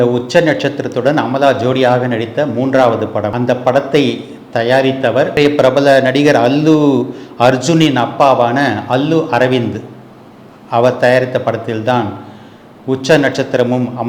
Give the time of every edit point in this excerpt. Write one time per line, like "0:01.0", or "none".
0:03.3
0:05.4

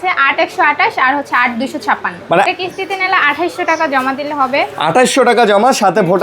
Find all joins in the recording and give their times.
0:02.4

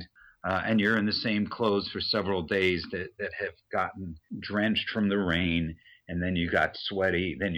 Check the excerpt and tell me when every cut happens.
0:04.3

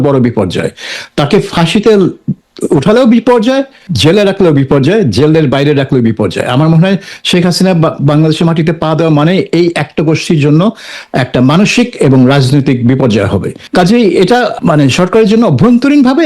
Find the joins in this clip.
0:03.8
0:13.6
0:14.5

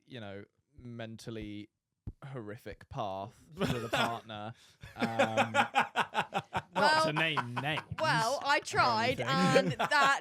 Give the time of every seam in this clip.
none

